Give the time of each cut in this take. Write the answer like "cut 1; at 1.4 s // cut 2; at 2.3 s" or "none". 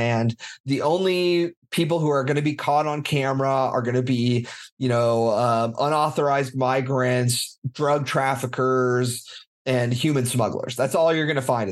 none